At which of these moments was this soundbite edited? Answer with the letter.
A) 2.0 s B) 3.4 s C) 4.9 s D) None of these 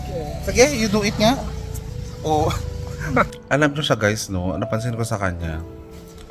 B